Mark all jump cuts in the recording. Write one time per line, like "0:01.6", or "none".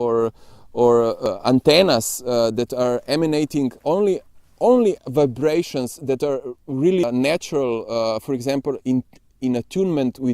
0:01.2
0:07.0